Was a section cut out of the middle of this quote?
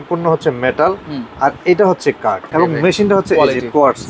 yes; 1 cut; at 2.5 s

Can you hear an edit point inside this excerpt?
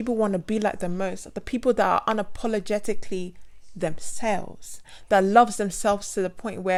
no; 0 cuts

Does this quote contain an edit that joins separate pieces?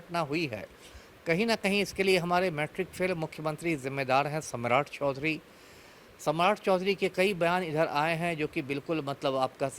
no; 0 cuts

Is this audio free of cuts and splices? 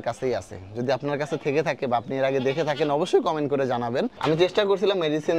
no; 1 cut; at 4.1 s

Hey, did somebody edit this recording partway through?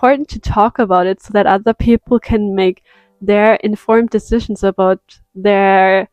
no; 0 cuts

